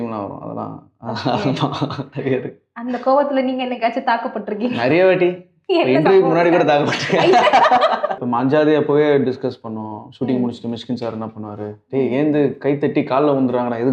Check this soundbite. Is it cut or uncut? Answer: cut